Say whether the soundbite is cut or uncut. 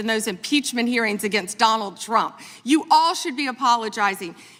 uncut